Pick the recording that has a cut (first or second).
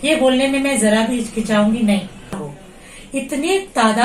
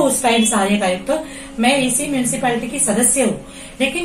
first